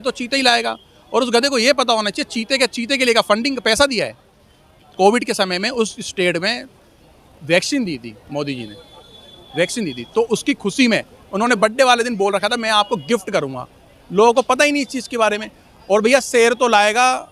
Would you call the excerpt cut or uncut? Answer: uncut